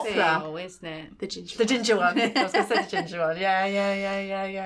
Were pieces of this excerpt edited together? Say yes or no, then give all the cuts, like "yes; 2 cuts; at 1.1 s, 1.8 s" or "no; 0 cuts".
no; 0 cuts